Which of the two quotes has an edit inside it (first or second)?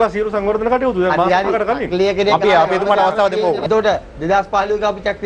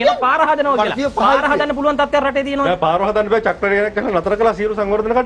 first